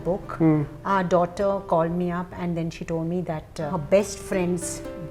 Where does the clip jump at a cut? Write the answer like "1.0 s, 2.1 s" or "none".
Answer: none